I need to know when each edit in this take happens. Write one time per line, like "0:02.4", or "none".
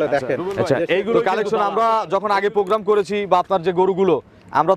0:01.2